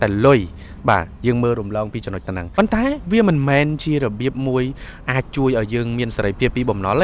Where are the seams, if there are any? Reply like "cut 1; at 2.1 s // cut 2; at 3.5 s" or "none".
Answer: cut 1; at 2.5 s